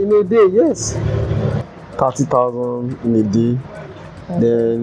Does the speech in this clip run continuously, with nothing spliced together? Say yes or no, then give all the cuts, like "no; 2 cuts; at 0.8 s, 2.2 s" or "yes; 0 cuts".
no; 1 cut; at 1.6 s